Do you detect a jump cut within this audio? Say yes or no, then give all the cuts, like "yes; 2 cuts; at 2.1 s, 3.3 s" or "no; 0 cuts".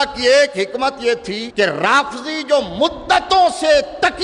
yes; 1 cut; at 1.4 s